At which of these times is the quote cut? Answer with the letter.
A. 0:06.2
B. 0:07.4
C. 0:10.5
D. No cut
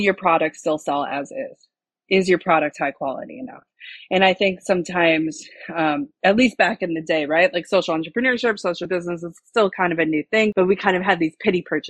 C